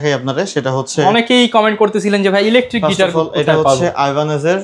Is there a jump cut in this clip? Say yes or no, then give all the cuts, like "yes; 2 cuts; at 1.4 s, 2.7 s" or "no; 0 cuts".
no; 0 cuts